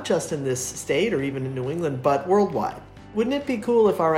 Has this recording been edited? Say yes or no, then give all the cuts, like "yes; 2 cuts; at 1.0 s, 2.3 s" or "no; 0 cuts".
yes; 1 cut; at 3.1 s